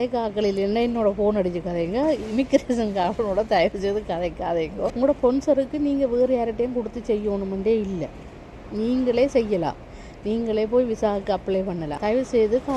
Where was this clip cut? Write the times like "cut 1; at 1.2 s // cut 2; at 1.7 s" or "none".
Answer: cut 1; at 4.9 s // cut 2; at 11.9 s